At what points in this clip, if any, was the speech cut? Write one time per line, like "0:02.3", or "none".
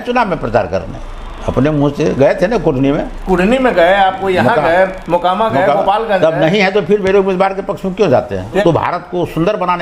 0:08.6